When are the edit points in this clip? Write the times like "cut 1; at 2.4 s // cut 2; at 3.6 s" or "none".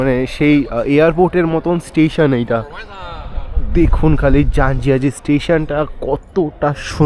none